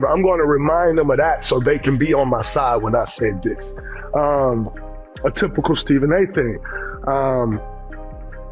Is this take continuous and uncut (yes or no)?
yes